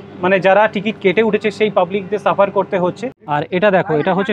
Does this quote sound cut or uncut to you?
cut